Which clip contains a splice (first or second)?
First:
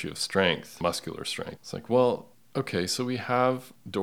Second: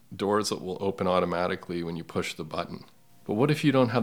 first